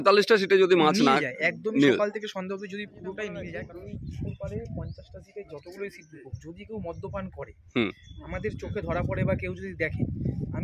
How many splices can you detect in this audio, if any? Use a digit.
1